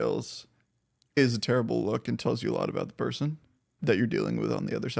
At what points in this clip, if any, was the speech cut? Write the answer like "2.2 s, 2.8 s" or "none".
1.2 s, 3.7 s

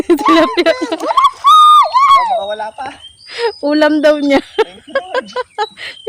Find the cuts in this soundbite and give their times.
none

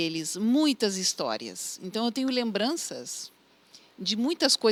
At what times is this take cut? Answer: none

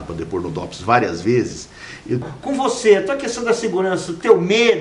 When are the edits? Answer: 2.3 s

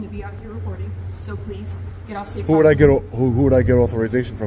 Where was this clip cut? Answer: none

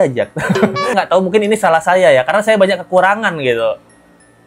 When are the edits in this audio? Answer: 0.9 s

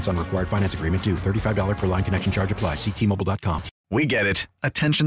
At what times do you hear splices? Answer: 3.7 s

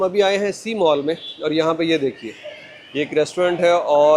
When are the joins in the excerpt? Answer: none

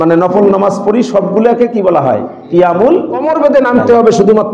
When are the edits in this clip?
3.2 s

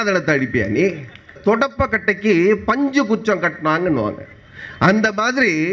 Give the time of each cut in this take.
1.4 s

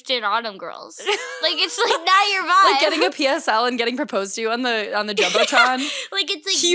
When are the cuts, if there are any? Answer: none

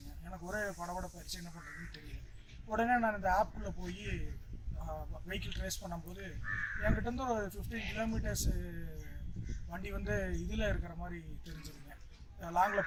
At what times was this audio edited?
none

